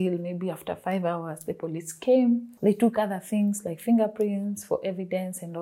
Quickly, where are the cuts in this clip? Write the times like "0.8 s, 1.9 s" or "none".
none